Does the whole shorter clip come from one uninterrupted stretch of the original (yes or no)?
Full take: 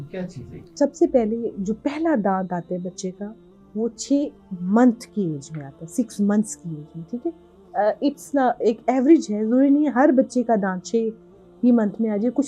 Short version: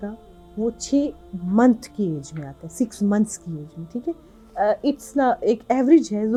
yes